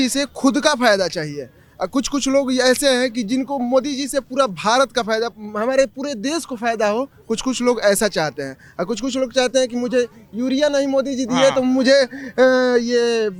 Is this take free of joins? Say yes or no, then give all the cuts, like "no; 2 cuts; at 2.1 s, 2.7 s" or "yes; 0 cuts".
yes; 0 cuts